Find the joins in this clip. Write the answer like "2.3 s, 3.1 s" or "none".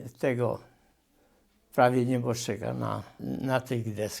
3.2 s